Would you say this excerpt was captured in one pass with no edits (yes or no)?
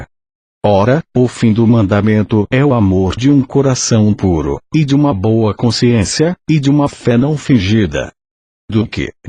no